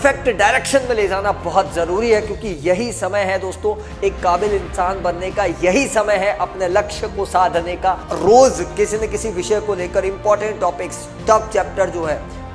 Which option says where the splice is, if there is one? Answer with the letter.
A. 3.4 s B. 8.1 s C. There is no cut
B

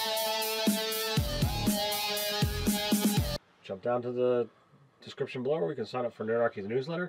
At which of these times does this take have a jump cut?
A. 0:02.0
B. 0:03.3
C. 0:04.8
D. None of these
B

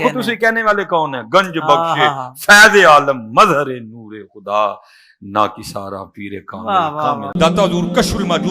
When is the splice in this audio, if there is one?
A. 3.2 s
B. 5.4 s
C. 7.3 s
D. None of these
C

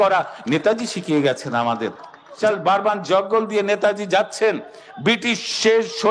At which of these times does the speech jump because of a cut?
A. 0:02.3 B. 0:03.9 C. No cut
A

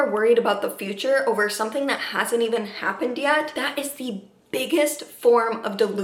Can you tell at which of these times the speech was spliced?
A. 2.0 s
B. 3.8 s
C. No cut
C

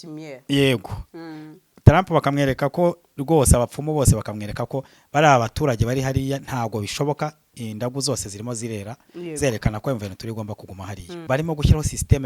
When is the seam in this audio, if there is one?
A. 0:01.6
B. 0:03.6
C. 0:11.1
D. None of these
C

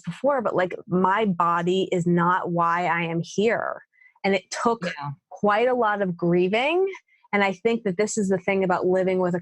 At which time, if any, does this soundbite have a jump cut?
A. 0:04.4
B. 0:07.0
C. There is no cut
C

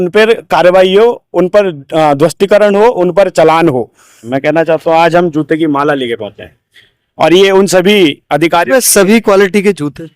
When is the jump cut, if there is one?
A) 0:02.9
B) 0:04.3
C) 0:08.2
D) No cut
B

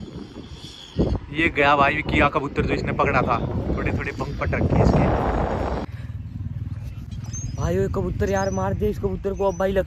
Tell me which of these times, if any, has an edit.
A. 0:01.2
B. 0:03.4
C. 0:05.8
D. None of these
C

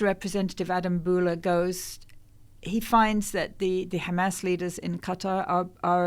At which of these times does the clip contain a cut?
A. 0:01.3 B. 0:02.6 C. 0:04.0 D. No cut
D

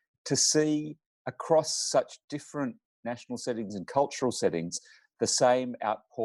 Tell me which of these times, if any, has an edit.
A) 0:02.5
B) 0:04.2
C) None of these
C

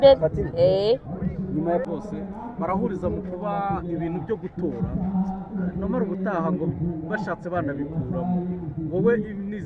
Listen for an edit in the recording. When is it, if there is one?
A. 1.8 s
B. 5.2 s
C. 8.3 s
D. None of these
A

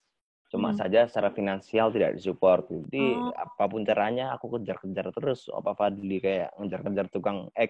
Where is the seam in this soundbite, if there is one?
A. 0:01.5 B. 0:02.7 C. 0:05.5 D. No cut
B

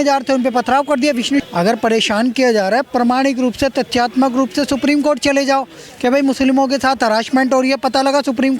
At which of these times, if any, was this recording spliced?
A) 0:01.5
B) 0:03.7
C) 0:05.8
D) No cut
A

